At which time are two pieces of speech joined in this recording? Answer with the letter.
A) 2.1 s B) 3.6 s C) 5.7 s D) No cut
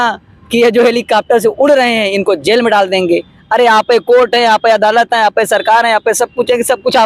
D